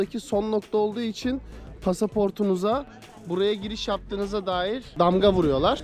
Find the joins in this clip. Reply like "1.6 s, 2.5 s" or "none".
4.9 s

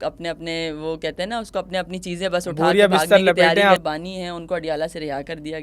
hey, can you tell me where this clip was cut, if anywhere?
3.8 s

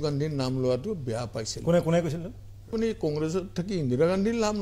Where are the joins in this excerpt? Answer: 2.7 s

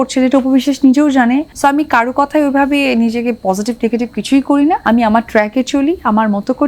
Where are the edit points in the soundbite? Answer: 1.5 s, 4.8 s

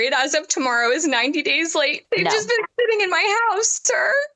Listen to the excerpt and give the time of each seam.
2.0 s

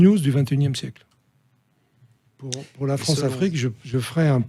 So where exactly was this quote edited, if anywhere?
2.5 s

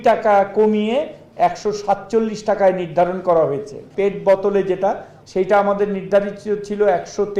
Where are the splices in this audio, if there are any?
3.8 s, 5.2 s

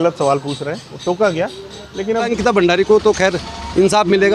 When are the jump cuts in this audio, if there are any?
2.3 s

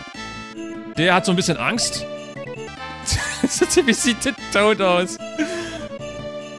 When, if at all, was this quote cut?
2.7 s

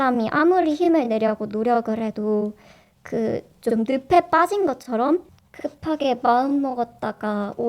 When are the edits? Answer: 5.3 s

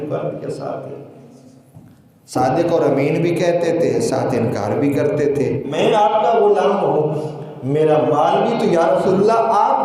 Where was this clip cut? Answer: 5.7 s

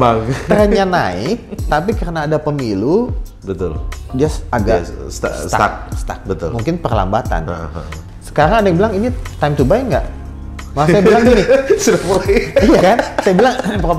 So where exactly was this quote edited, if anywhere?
8.0 s

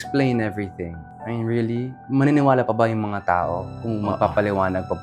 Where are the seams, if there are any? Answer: none

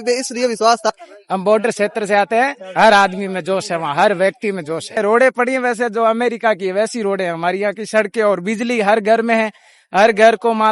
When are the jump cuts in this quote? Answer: 0.9 s, 5.0 s

